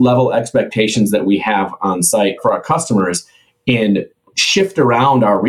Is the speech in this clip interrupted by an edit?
yes; 1 cut; at 2.4 s

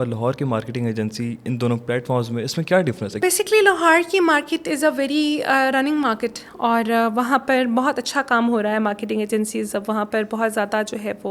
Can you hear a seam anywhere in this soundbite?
no; 0 cuts

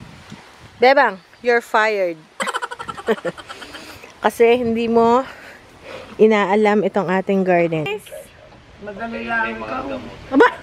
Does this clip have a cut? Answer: yes; 1 cut; at 7.8 s

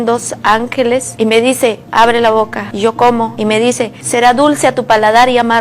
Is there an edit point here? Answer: yes; 3 cuts; at 1.1 s, 2.6 s, 3.6 s

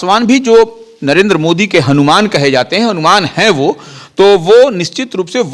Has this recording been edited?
no; 0 cuts

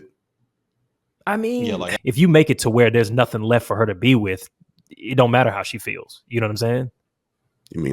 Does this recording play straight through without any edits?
no; 1 cut; at 1.9 s

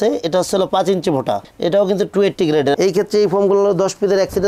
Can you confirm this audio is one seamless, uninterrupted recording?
yes; 0 cuts

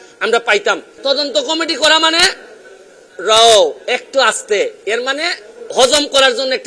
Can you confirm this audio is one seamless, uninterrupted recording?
no; 1 cut; at 0.9 s

